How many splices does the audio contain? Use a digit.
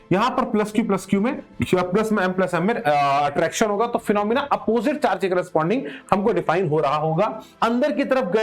1